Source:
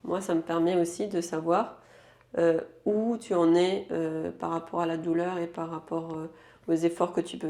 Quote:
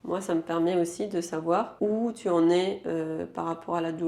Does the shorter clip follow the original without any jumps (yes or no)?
no